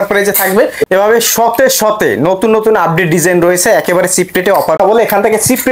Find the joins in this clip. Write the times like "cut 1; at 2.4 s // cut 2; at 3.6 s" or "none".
cut 1; at 0.8 s // cut 2; at 4.8 s

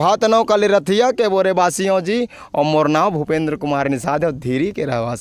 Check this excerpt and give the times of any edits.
none

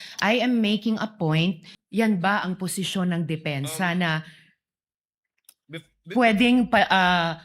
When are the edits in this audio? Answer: cut 1; at 1.7 s

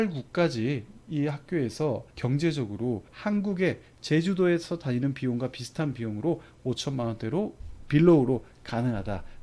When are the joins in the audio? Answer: cut 1; at 1.0 s

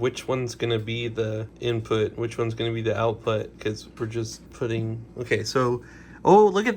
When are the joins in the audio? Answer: cut 1; at 1.5 s // cut 2; at 4.4 s

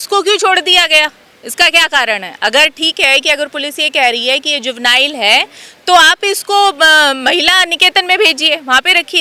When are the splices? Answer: none

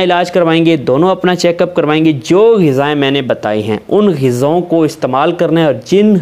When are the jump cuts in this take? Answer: none

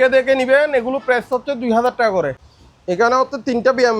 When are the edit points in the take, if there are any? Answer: cut 1; at 2.4 s

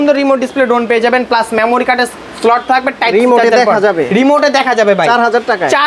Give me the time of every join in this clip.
none

